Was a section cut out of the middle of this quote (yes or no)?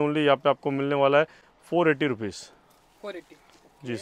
no